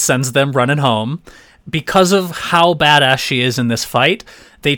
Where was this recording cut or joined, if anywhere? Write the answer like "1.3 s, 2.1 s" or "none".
1.3 s